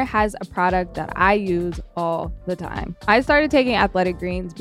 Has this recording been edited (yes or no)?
yes